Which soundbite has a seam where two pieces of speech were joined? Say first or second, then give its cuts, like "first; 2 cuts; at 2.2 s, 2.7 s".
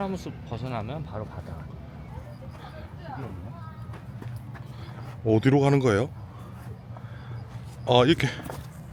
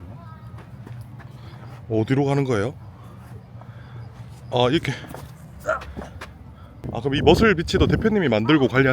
second; 1 cut; at 6.7 s